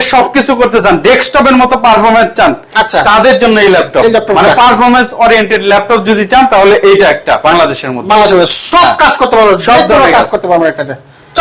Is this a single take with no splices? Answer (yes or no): yes